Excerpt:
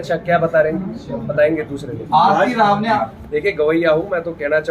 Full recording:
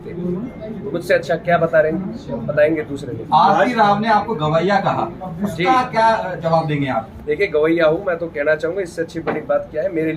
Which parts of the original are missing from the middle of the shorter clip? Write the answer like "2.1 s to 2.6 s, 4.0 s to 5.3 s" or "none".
4.2 s to 6.9 s